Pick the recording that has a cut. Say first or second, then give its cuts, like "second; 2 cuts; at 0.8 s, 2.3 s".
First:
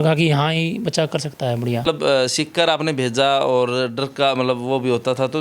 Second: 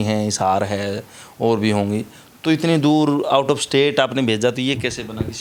first; 1 cut; at 1.9 s